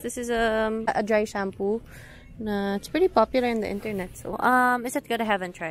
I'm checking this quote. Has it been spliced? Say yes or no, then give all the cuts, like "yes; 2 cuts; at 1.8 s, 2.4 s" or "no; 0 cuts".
yes; 2 cuts; at 0.9 s, 4.4 s